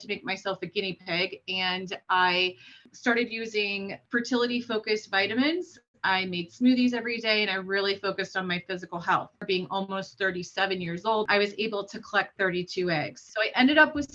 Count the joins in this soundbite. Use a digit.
5